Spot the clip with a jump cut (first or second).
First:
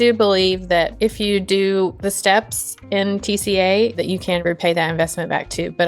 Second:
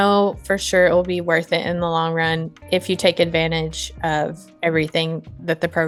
first